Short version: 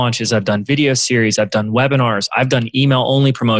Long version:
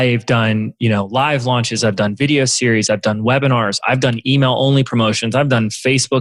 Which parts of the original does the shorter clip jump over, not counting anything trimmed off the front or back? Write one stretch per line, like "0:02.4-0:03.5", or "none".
none